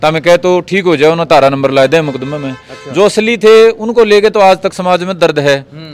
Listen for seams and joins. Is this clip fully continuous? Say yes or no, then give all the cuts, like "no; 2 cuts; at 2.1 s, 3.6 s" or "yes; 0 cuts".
yes; 0 cuts